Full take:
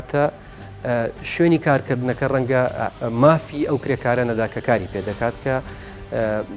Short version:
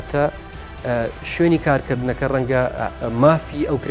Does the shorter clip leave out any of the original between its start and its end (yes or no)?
no